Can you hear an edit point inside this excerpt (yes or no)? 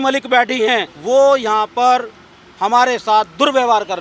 yes